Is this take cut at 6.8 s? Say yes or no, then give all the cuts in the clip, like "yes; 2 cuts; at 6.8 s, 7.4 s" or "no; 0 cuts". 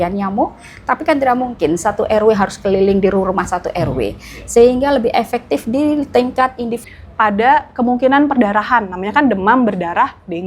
yes; 1 cut; at 6.8 s